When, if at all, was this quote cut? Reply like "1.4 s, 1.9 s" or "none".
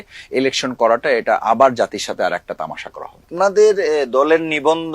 3.3 s